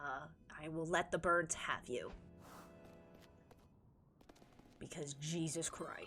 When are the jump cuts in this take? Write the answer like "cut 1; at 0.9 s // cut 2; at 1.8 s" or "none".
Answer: none